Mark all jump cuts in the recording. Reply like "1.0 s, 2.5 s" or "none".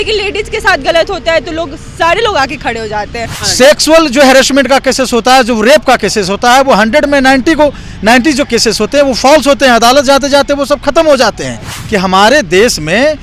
3.4 s, 11.8 s